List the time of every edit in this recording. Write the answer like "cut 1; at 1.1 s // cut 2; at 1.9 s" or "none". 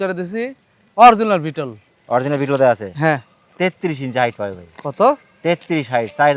none